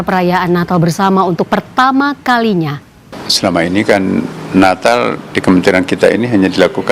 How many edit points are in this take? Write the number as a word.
one